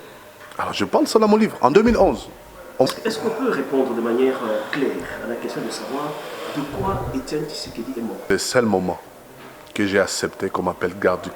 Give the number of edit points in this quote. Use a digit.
2